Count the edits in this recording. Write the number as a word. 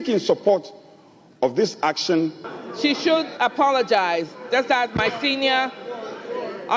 one